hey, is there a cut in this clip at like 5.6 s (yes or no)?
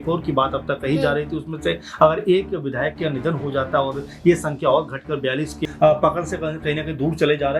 yes